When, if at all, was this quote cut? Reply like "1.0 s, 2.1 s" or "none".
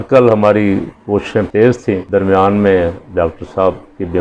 1.5 s